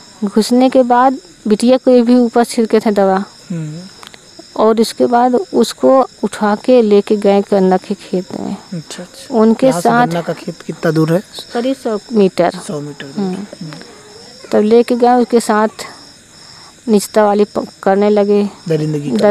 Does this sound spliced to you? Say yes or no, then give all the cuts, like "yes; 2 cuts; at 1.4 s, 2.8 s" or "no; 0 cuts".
no; 0 cuts